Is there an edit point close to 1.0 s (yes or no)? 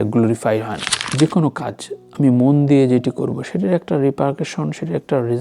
yes